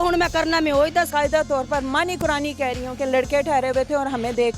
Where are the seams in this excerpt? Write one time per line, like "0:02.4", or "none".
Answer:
0:01.1